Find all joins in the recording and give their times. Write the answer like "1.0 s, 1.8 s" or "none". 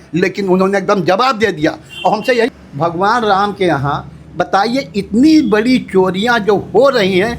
2.5 s